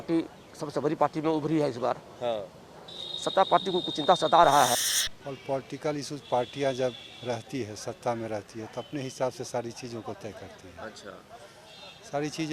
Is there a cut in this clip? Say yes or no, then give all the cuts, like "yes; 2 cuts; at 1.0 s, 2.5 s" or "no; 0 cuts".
yes; 1 cut; at 4.9 s